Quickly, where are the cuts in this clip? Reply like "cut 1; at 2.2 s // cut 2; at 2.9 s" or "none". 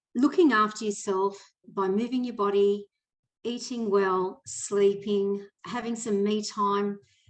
cut 1; at 1.6 s // cut 2; at 5.5 s